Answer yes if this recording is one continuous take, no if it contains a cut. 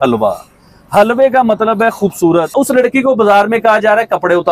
no